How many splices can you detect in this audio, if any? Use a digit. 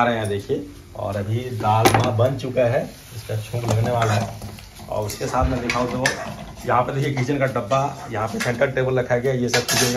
0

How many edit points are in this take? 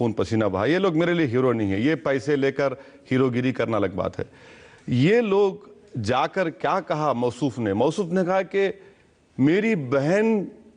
1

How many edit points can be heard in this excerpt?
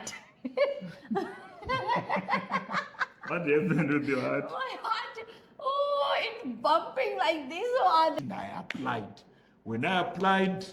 1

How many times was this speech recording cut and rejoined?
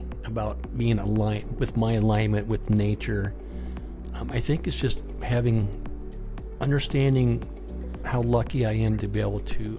0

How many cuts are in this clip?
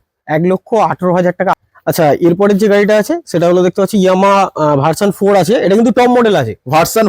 1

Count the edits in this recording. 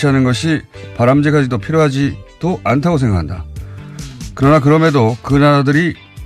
1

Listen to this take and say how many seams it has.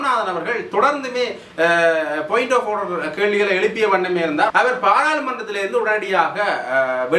1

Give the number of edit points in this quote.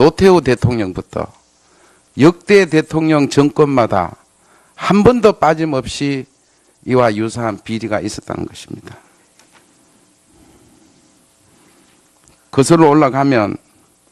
1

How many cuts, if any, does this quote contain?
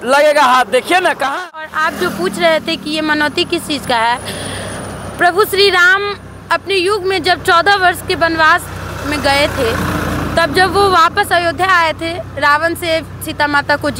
1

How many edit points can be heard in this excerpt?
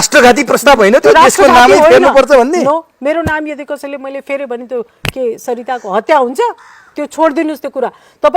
0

